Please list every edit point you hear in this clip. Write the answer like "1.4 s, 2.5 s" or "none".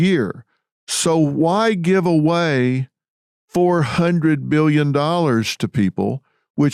none